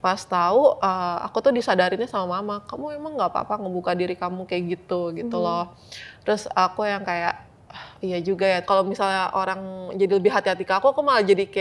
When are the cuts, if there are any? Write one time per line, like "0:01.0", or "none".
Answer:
0:08.6